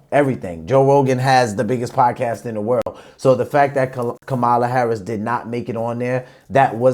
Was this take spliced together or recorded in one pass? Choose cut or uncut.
uncut